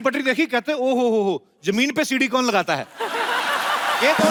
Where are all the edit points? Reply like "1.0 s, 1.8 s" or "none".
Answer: none